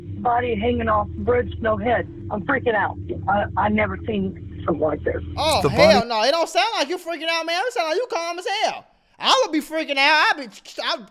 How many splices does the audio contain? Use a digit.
0